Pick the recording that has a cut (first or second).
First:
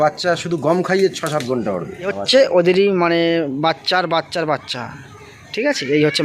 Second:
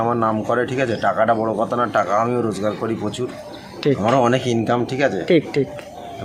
first